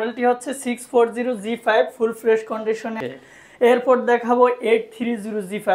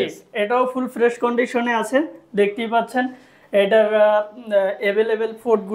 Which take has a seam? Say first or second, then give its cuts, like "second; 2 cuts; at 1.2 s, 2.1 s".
first; 1 cut; at 2.9 s